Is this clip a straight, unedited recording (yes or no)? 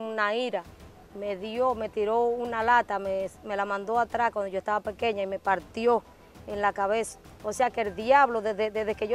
no